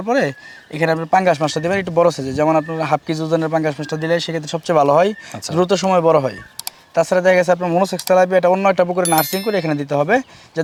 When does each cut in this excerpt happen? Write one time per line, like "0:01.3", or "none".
none